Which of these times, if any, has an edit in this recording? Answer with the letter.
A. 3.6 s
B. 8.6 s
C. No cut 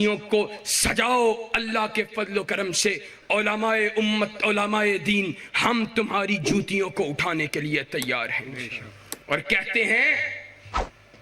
C